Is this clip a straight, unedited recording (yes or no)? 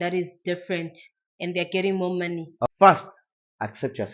no